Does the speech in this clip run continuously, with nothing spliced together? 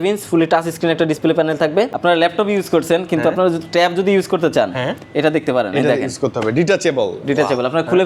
no; 1 cut; at 1.9 s

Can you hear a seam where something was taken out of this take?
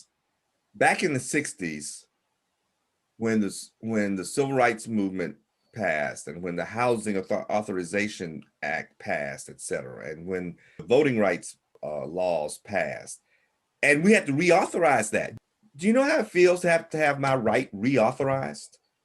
yes; 4 cuts; at 10.8 s, 11.8 s, 15.3 s, 16.9 s

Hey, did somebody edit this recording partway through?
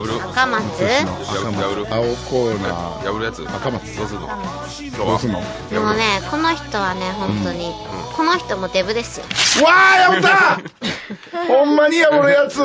no; 0 cuts

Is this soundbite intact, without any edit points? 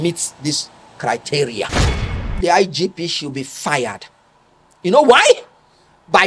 no; 1 cut; at 1.7 s

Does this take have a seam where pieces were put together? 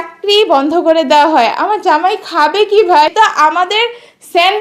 yes; 1 cut; at 3.1 s

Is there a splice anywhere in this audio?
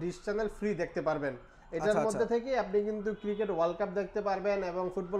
no; 0 cuts

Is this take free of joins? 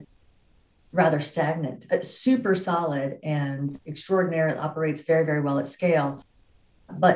no; 1 cut; at 3.9 s

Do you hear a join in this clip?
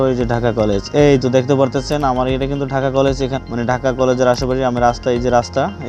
yes; 1 cut; at 3.4 s

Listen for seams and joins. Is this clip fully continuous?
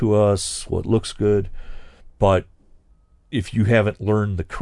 yes; 0 cuts

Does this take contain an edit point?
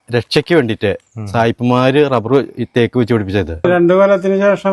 yes; 1 cut; at 3.7 s

